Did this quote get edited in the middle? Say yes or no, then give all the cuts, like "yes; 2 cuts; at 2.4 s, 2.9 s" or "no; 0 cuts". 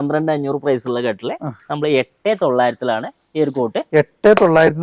no; 0 cuts